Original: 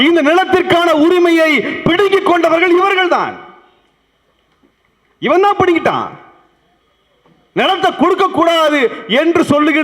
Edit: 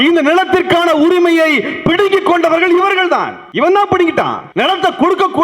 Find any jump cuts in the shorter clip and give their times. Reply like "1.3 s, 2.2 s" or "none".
3.4 s, 4.4 s